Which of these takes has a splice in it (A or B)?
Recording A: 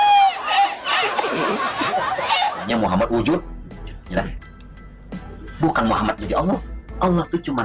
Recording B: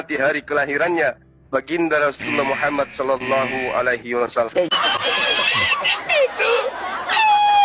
A